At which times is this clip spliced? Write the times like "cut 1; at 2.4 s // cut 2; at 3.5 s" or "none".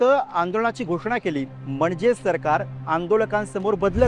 cut 1; at 1.6 s